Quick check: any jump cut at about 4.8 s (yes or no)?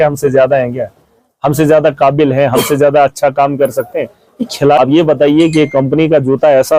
yes